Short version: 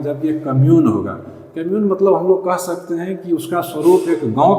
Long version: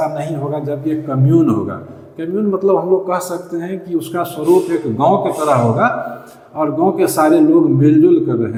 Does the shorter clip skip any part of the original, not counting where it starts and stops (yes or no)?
no